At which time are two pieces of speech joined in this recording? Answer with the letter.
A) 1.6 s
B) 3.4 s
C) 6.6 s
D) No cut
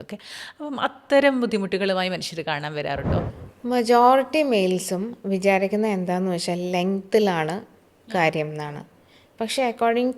B